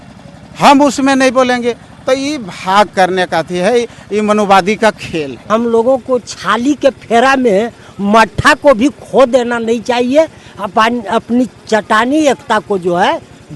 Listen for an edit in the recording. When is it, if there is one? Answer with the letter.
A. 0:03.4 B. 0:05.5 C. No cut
B